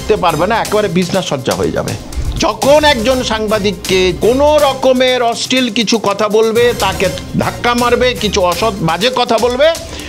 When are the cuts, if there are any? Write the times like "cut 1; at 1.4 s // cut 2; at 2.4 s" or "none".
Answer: cut 1; at 2.0 s // cut 2; at 4.1 s // cut 3; at 7.3 s